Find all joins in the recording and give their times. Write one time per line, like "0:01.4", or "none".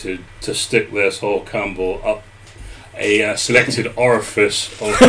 none